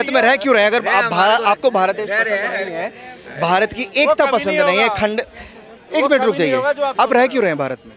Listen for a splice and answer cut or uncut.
uncut